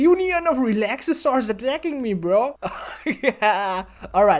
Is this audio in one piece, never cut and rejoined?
yes; 0 cuts

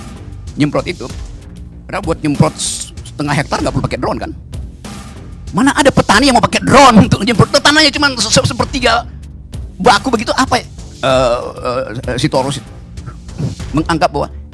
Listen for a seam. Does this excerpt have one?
yes; 1 cut; at 10.7 s

